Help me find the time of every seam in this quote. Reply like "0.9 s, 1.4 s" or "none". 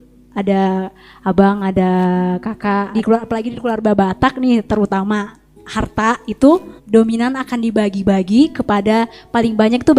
2.9 s, 6.7 s